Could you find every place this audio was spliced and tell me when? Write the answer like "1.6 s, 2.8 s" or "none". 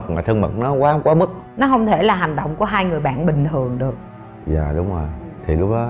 1.4 s

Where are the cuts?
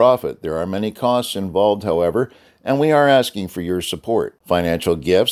none

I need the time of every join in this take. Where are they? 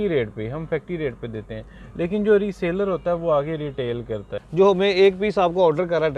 4.4 s

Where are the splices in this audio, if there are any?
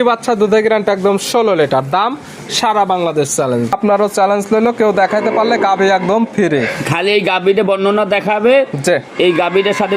3.7 s

